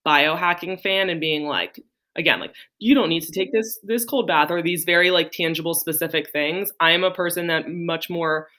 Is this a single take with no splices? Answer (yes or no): yes